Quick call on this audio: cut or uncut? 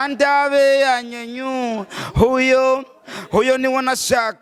uncut